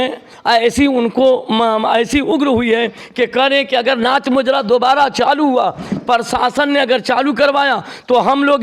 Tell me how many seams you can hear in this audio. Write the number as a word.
zero